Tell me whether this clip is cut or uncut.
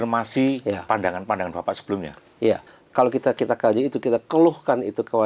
cut